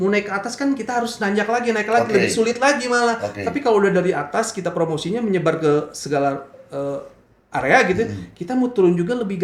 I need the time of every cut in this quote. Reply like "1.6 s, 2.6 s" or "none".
none